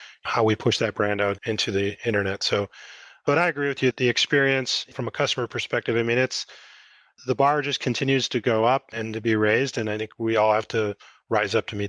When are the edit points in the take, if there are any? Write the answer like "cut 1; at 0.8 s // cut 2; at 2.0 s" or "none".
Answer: cut 1; at 4.9 s